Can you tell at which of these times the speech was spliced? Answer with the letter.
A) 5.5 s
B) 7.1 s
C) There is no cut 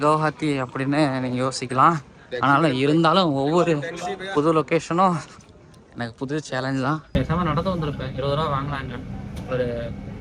B